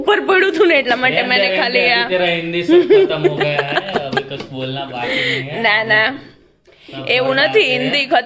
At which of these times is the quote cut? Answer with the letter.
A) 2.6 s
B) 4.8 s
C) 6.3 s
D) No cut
D